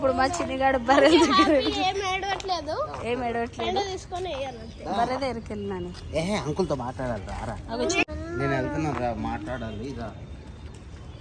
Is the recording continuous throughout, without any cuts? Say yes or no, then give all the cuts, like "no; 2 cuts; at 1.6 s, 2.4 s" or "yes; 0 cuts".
no; 1 cut; at 8.0 s